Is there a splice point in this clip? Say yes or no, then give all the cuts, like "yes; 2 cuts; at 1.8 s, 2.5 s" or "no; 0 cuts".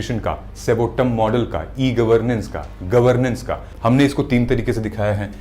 yes; 1 cut; at 3.6 s